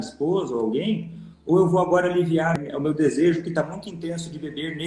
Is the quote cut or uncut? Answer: cut